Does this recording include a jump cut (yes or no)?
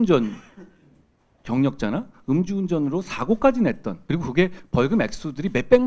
yes